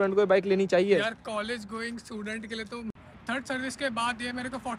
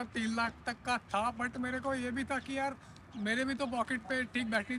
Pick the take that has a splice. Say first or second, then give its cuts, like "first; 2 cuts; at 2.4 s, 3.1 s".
first; 1 cut; at 3.1 s